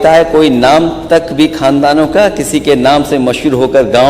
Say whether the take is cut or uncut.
uncut